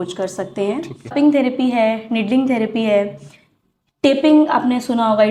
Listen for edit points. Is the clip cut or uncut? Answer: cut